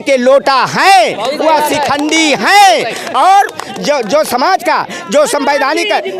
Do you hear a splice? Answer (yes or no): no